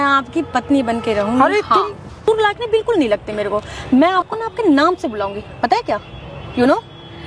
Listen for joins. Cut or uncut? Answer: cut